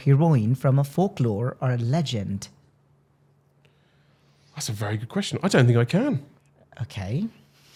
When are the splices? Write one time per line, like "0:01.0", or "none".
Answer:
none

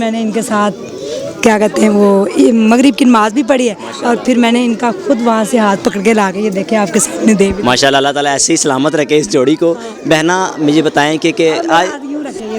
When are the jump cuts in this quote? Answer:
none

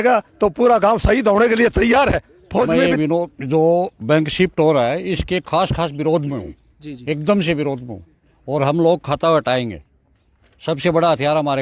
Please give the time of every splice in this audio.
0:02.8

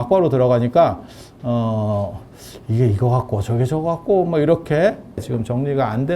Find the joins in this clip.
0:05.2

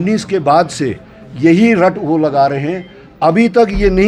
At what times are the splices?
none

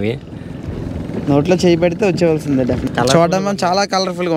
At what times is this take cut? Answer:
0:02.8

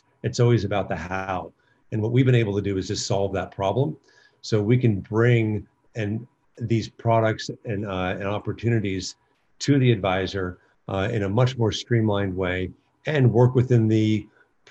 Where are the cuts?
none

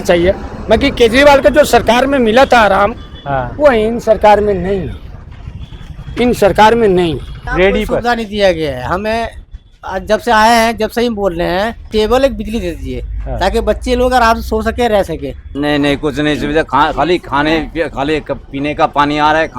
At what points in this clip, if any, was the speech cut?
0:07.3
0:11.8
0:15.4

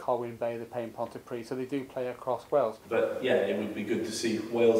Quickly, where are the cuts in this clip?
0:02.8

